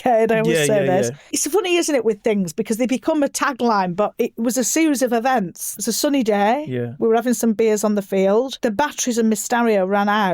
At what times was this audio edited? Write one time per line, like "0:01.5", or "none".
0:01.4
0:05.7
0:08.5